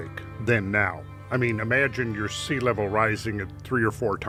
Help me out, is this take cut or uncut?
uncut